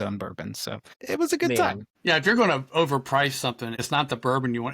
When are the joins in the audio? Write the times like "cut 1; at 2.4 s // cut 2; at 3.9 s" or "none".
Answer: cut 1; at 0.9 s // cut 2; at 1.9 s // cut 3; at 3.8 s